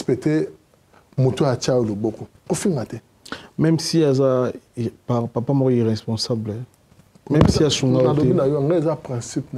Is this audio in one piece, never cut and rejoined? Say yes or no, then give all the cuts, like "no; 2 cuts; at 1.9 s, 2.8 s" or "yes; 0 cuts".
yes; 0 cuts